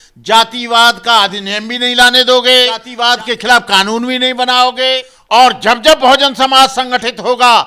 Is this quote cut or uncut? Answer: cut